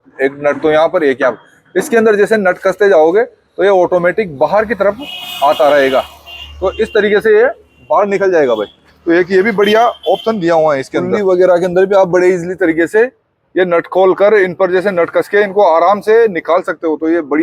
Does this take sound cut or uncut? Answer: uncut